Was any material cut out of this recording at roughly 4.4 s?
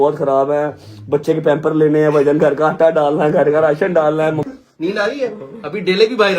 yes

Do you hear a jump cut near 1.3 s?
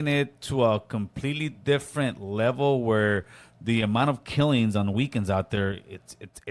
no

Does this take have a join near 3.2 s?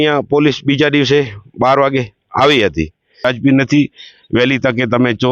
yes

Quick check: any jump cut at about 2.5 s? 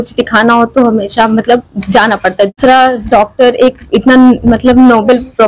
yes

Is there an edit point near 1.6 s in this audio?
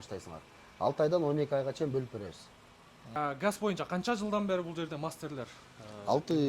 no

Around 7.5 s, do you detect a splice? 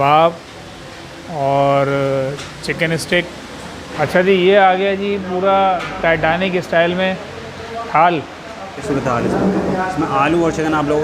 no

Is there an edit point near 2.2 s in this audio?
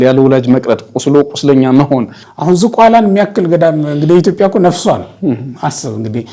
yes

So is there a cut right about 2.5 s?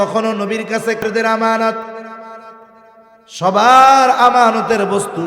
no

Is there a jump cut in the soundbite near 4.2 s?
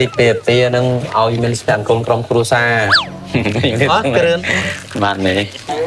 no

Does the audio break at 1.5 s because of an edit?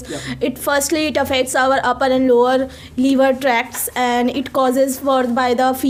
no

